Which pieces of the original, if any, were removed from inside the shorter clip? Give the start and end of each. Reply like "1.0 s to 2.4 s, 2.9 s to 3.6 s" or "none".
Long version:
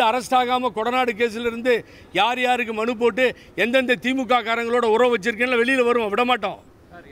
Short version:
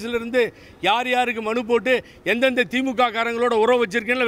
none